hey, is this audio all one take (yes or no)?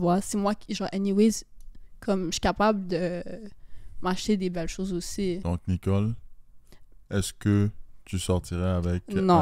no